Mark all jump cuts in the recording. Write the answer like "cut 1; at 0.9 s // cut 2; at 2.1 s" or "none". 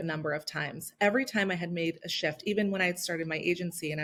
none